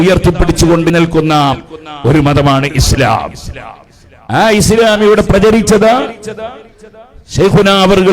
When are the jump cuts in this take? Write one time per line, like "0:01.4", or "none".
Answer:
0:00.9